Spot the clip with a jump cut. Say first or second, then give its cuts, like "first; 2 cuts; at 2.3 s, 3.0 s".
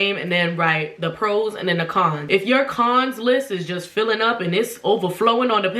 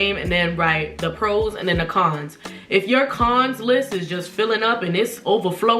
first; 1 cut; at 2.2 s